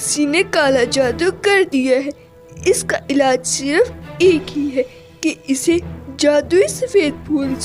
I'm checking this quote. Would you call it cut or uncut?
uncut